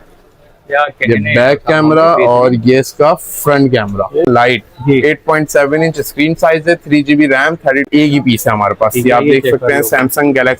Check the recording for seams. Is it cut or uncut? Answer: cut